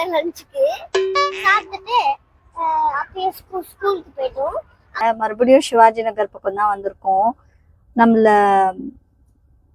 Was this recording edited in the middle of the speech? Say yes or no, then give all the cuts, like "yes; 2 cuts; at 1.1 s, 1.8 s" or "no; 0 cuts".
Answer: yes; 1 cut; at 5.0 s